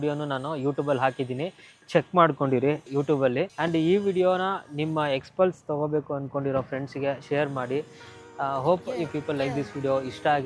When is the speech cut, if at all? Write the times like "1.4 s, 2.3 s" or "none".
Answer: none